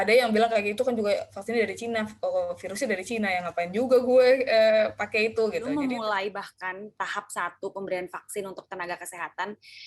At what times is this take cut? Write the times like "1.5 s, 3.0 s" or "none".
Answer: 5.7 s